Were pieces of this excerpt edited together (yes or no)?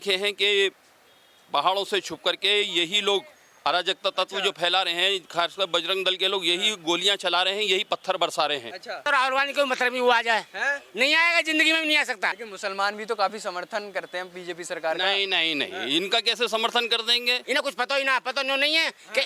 yes